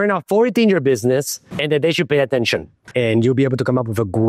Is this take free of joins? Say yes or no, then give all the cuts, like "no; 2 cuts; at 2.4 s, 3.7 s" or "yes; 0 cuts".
no; 1 cut; at 2.8 s